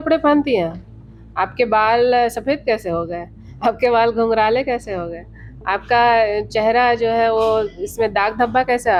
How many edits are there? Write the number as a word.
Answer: zero